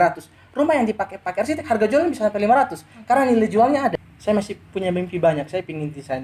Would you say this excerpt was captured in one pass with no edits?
no; 1 cut; at 3.9 s

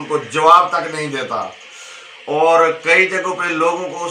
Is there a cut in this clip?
no; 0 cuts

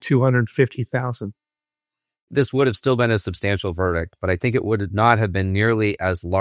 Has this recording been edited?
yes; 1 cut; at 2.3 s

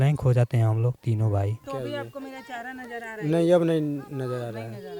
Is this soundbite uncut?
no; 1 cut; at 1.6 s

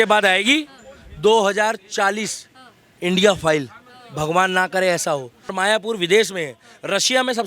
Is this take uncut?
no; 1 cut; at 5.4 s

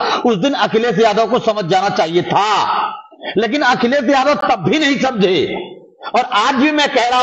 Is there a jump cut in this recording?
no; 0 cuts

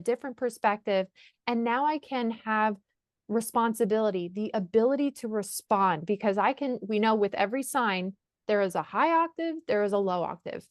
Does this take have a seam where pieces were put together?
no; 0 cuts

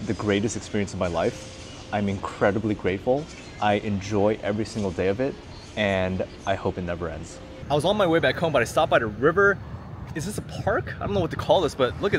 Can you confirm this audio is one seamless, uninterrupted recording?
yes; 0 cuts

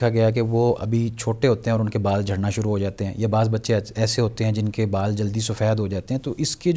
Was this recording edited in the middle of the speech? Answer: no; 0 cuts

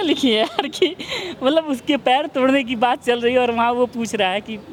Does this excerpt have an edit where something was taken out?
no; 0 cuts

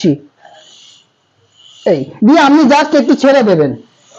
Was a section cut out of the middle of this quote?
no; 0 cuts

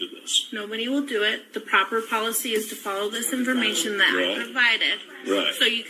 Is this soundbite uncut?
yes; 0 cuts

